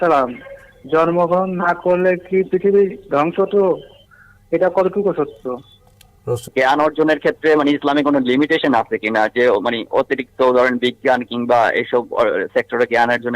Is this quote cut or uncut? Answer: cut